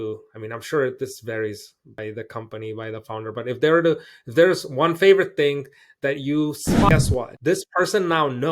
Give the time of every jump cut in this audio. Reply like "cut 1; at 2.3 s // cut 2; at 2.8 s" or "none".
cut 1; at 6.9 s